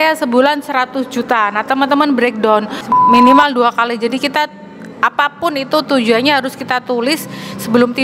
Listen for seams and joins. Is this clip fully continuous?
no; 1 cut; at 2.8 s

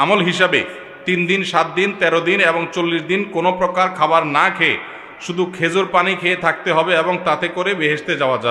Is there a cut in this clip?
no; 0 cuts

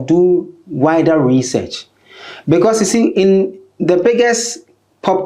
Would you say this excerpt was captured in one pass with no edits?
yes; 0 cuts

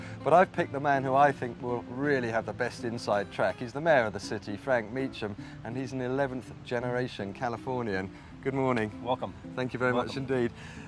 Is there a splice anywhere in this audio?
yes; 1 cut; at 5.3 s

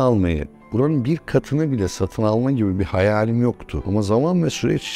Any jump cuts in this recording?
no; 0 cuts

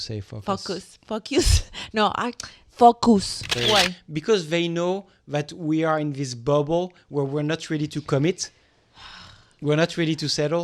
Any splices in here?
yes; 1 cut; at 3.4 s

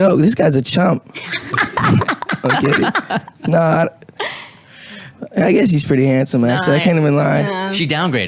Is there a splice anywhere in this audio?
yes; 1 cut; at 6.8 s

